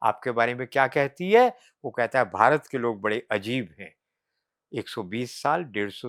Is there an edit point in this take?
no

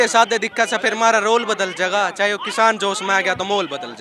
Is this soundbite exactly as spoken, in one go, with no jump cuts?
yes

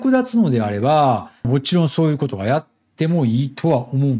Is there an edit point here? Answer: no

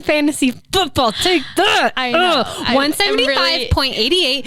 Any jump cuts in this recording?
no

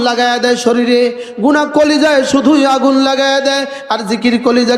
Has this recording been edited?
no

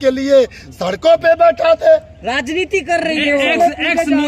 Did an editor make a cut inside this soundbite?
no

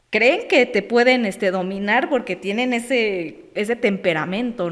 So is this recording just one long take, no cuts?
yes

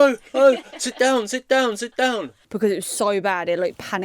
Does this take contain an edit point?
yes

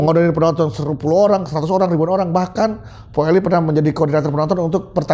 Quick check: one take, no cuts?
yes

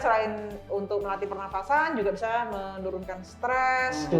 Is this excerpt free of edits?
yes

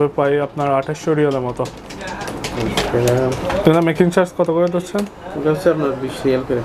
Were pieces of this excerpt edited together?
no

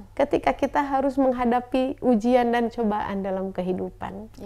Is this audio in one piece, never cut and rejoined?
yes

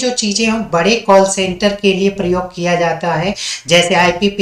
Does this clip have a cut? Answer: no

